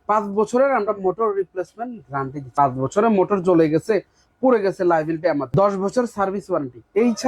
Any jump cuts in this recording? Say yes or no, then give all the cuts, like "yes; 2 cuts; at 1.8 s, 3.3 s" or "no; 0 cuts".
yes; 2 cuts; at 2.4 s, 5.5 s